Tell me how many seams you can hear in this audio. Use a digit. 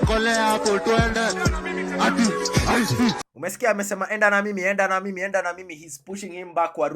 1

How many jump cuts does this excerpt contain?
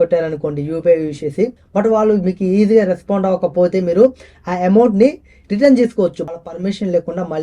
2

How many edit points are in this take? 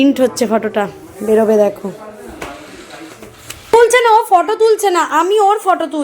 1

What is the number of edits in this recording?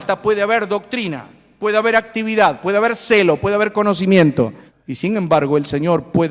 1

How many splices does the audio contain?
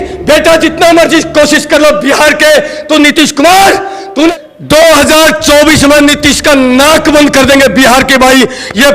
1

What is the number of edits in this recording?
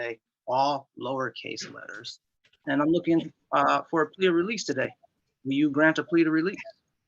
1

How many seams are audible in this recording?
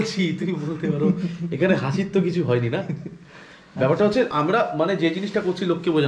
0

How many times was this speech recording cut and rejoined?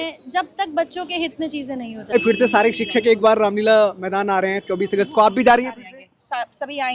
1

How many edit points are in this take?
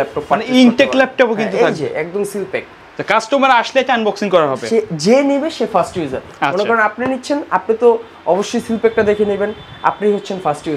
0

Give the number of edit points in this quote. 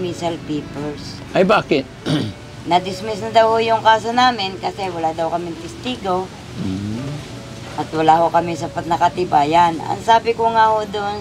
0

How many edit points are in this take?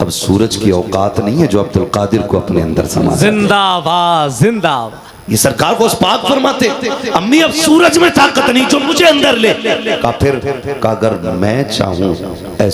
0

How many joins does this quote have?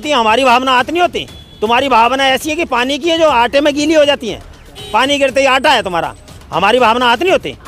0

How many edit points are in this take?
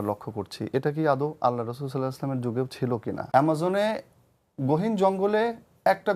1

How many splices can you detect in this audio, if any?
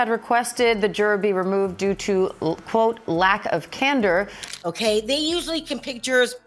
1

